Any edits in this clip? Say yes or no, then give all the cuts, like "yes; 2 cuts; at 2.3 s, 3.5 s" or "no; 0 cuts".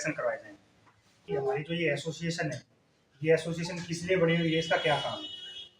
yes; 1 cut; at 1.2 s